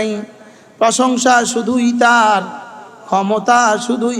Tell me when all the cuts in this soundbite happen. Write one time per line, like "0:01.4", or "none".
none